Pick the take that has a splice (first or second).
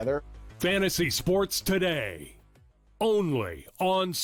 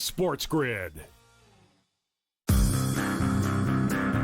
second